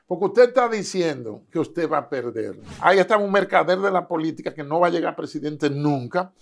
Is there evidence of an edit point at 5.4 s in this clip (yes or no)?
no